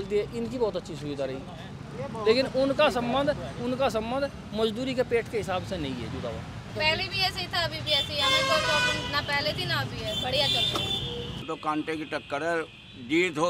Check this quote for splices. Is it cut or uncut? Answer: cut